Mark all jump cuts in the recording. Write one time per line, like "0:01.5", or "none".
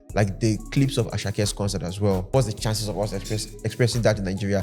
0:02.3